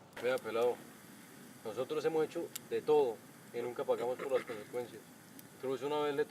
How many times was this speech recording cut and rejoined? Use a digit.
0